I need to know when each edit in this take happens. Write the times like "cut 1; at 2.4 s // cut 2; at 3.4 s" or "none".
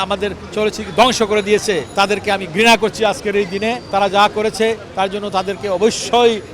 cut 1; at 1.9 s // cut 2; at 3.8 s